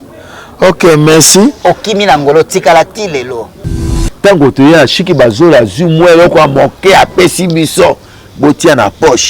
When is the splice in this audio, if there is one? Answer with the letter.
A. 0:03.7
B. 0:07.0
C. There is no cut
A